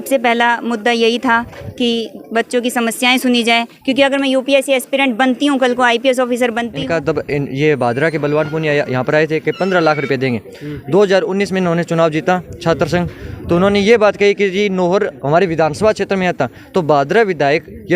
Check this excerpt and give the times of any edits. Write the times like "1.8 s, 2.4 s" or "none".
6.7 s